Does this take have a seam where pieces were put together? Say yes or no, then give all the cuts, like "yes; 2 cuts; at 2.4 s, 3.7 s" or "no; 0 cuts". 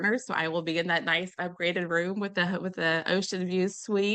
no; 0 cuts